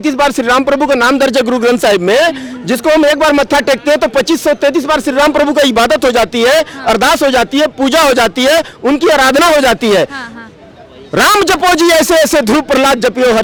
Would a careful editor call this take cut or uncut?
uncut